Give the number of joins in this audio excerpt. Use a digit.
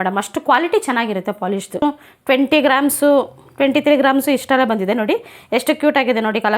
1